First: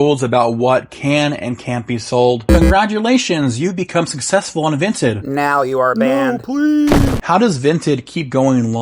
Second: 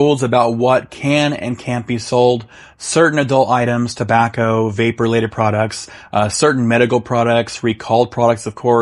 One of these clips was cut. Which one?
first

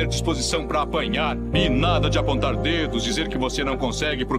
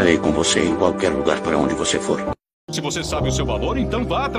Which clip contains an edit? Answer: second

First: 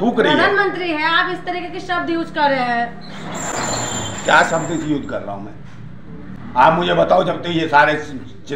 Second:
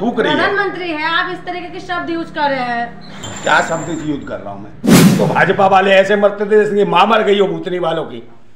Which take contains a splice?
second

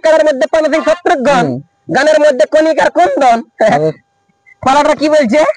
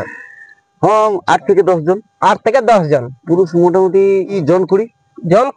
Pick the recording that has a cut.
second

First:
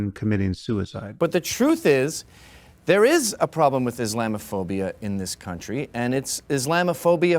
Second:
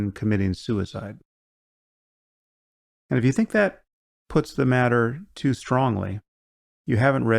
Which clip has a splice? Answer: first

